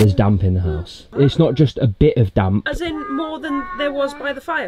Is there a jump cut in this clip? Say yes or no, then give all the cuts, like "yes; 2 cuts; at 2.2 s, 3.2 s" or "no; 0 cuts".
yes; 1 cut; at 1.1 s